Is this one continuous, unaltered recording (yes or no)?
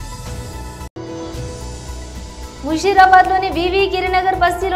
no